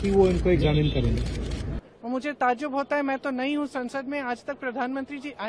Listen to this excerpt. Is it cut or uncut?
cut